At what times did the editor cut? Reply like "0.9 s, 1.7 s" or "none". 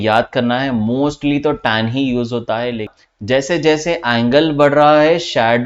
3.0 s